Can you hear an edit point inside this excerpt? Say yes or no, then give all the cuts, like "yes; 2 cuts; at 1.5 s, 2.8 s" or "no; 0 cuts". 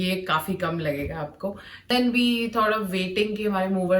yes; 1 cut; at 1.9 s